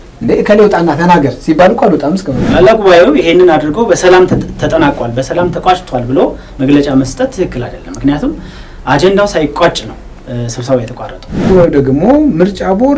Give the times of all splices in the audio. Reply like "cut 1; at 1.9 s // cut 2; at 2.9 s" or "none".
cut 1; at 2.4 s // cut 2; at 11.5 s